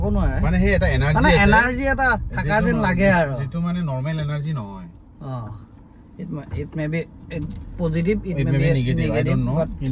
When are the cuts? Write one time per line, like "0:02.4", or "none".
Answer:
none